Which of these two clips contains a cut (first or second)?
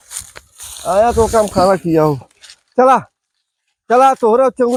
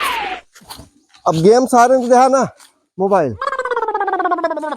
second